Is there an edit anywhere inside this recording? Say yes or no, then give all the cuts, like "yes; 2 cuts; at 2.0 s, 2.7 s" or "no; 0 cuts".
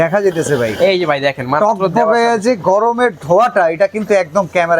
no; 0 cuts